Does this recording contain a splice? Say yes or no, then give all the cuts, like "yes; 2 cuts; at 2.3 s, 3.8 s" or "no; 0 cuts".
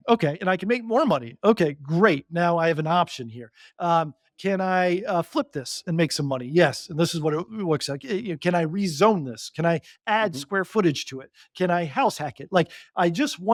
no; 0 cuts